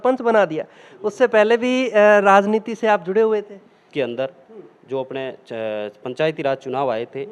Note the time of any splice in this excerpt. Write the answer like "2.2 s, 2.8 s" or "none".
3.8 s